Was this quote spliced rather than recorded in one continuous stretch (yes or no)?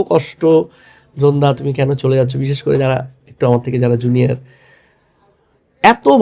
no